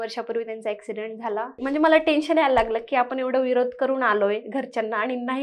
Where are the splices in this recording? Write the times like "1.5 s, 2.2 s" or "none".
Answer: 1.6 s

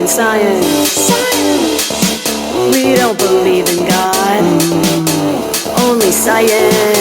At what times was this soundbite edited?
none

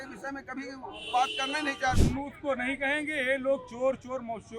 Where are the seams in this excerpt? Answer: 2.0 s

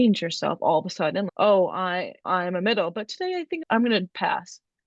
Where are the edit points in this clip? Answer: 3.6 s

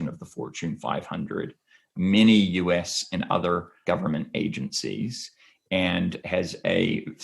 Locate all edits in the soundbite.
3.8 s, 6.2 s

